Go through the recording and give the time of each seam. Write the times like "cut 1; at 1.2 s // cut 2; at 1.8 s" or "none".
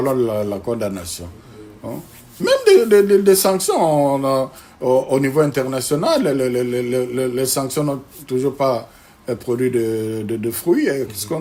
none